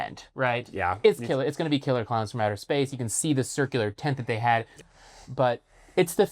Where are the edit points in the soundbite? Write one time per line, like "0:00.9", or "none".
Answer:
0:04.8